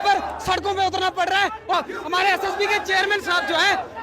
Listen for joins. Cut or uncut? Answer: cut